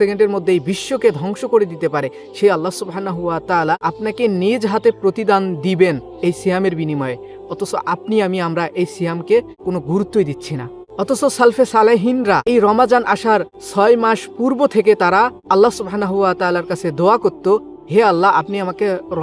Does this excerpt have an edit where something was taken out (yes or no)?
yes